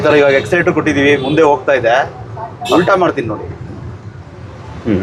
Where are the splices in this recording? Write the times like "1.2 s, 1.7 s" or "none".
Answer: none